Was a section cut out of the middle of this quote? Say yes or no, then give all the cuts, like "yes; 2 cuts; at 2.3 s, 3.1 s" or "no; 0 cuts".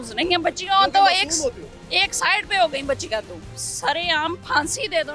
yes; 1 cut; at 3.5 s